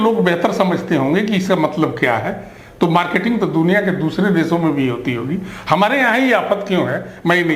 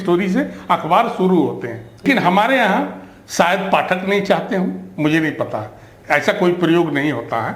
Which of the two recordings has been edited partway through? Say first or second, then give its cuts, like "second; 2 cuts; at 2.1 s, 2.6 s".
second; 1 cut; at 2.0 s